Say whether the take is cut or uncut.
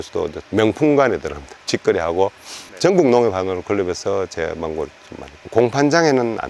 cut